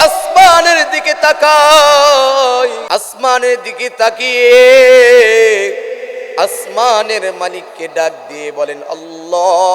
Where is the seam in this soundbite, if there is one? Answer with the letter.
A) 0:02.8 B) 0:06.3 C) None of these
A